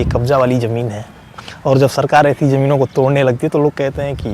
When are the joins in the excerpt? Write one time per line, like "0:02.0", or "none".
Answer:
none